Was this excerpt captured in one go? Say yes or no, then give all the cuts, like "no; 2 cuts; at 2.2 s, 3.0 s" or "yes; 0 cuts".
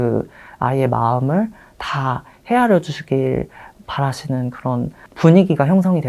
no; 1 cut; at 5.1 s